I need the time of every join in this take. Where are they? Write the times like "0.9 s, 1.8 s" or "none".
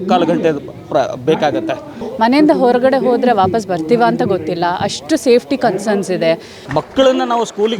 2.0 s, 6.5 s